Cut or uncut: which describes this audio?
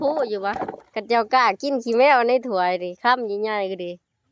cut